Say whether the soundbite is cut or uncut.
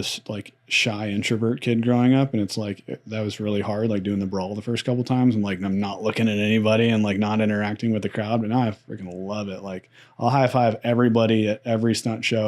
uncut